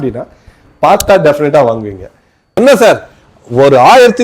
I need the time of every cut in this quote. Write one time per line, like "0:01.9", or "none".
0:02.5